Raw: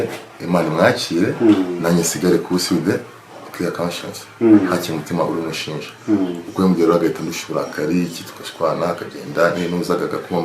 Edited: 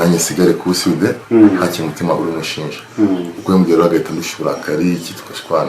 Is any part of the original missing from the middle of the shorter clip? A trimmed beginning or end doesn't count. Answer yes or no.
yes